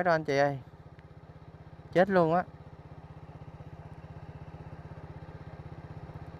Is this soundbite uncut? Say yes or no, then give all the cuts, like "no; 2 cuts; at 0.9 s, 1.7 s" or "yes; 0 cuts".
yes; 0 cuts